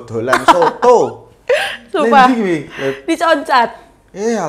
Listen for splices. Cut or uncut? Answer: uncut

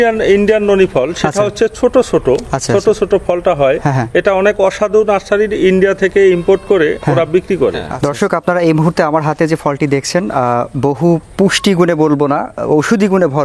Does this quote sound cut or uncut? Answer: cut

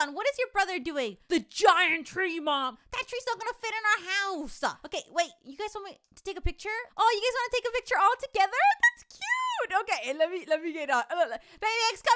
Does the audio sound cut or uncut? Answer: cut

